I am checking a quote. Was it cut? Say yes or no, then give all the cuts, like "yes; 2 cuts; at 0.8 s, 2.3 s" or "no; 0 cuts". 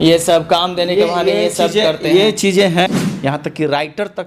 yes; 1 cut; at 2.9 s